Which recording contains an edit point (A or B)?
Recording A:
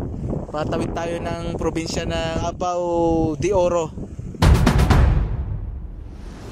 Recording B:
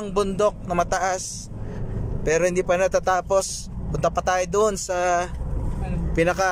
A